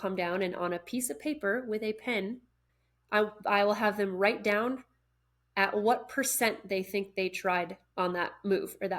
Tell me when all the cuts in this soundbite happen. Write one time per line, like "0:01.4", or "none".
0:02.6
0:07.8